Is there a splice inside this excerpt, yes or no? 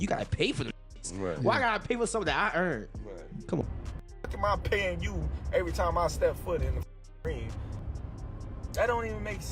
yes